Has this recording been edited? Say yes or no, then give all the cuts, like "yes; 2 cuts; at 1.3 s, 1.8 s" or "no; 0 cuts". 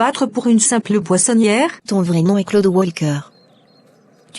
yes; 1 cut; at 1.8 s